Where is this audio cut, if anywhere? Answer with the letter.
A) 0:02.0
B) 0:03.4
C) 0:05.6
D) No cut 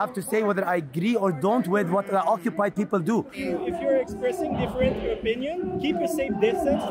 B